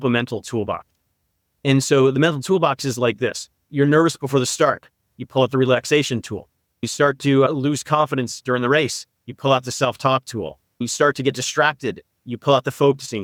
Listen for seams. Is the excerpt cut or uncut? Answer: uncut